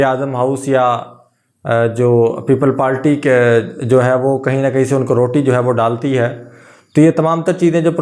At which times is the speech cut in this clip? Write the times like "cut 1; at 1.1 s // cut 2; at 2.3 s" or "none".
none